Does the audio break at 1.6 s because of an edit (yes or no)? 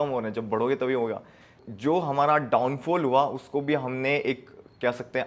yes